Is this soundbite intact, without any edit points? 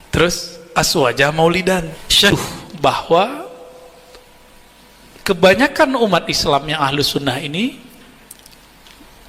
no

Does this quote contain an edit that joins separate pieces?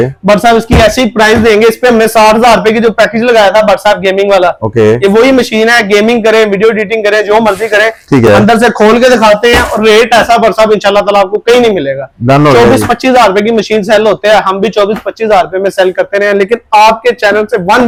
no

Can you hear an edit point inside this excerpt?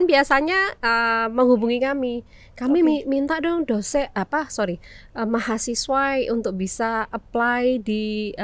no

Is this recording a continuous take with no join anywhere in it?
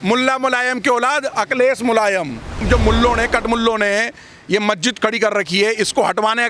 no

